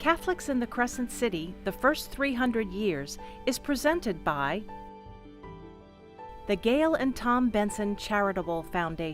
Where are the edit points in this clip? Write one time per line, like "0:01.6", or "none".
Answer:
0:04.6
0:06.2